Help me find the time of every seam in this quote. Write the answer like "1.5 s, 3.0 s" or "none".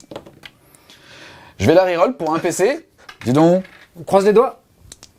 none